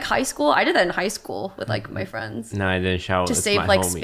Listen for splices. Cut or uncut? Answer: uncut